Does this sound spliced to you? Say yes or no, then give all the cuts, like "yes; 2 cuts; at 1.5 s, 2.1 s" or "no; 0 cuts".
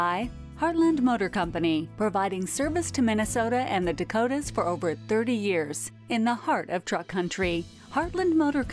no; 0 cuts